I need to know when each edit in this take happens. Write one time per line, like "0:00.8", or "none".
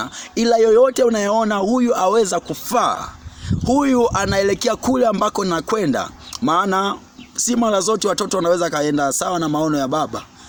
none